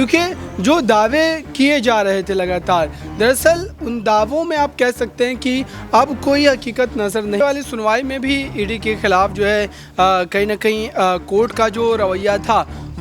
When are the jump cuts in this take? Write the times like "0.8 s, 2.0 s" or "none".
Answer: 7.4 s